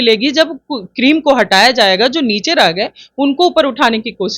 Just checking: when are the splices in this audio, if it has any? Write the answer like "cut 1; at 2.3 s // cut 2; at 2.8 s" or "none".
none